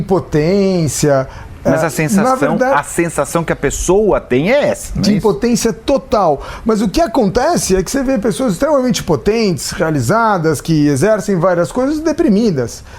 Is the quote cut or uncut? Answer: uncut